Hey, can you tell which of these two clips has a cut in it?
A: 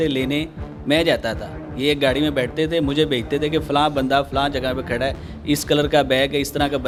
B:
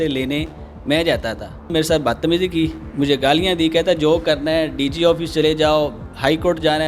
B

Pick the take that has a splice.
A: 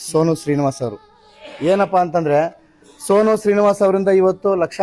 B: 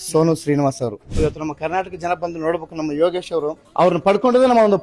B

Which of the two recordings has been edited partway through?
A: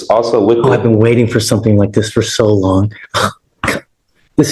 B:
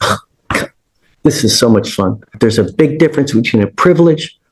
B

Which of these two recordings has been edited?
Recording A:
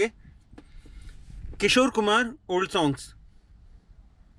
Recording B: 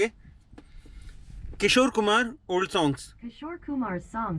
B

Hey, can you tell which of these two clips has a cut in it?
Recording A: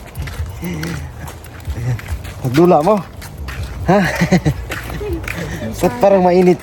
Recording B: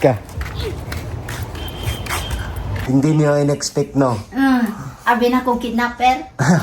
B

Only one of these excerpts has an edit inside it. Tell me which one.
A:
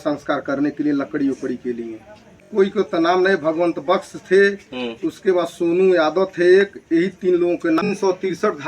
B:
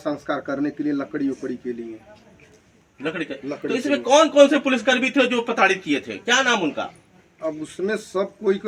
A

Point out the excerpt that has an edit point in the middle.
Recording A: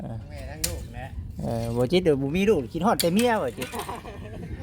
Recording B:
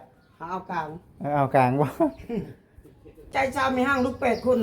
B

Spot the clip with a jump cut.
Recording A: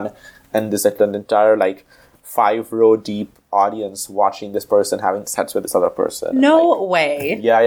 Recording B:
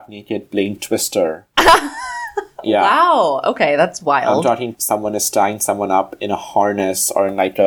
B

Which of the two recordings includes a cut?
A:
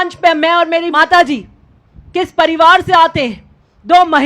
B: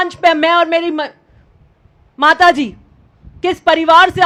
A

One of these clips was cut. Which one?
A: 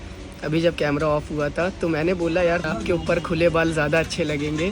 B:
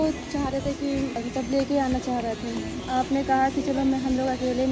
B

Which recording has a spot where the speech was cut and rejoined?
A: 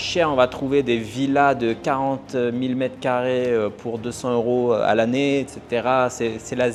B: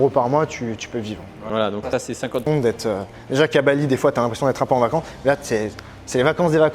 B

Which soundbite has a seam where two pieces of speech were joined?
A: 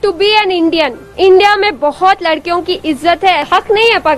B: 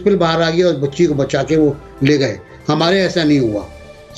A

